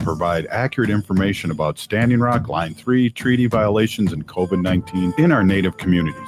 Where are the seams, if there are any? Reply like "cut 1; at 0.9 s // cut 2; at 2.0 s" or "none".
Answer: none